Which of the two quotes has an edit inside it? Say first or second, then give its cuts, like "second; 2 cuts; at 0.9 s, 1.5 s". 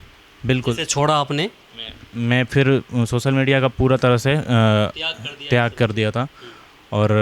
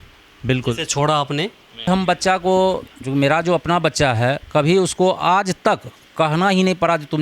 second; 1 cut; at 1.9 s